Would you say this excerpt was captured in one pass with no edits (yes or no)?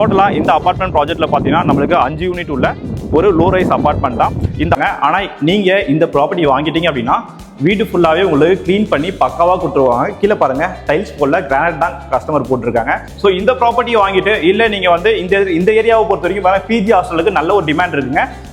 no